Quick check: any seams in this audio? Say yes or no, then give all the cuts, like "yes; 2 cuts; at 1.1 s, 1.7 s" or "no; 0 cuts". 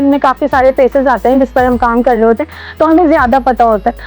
no; 0 cuts